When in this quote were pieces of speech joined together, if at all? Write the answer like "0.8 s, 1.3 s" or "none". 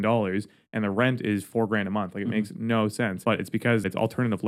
3.6 s

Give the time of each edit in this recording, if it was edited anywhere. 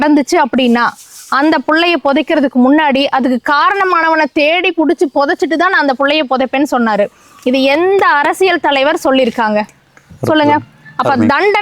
none

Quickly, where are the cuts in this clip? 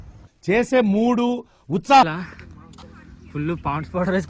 2.1 s

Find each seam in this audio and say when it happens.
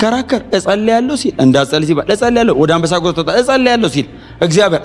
none

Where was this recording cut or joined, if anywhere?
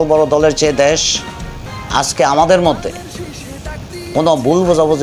none

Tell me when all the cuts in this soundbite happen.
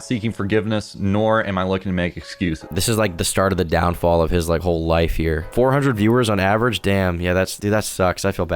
2.6 s, 5.5 s, 7.5 s

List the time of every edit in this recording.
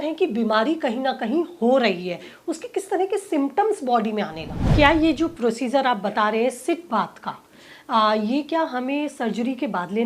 4.6 s

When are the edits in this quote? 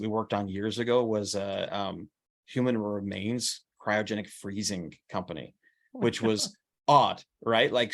none

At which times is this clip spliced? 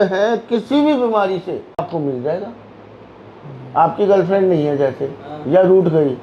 1.8 s

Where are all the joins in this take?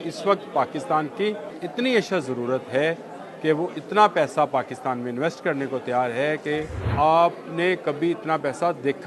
1.5 s, 6.9 s

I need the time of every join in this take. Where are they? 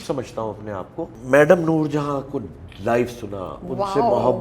1.2 s

